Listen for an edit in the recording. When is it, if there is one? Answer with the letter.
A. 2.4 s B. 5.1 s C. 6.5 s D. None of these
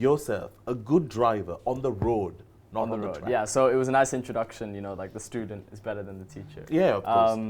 D